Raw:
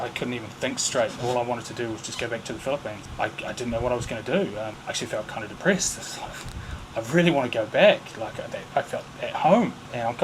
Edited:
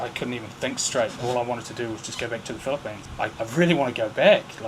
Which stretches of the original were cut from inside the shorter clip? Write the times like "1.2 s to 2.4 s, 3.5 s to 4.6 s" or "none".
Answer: 3.3 s to 6.9 s